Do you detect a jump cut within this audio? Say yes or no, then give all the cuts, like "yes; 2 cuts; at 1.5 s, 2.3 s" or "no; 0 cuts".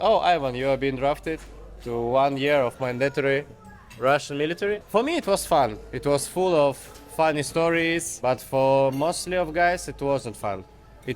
yes; 2 cuts; at 4.8 s, 8.1 s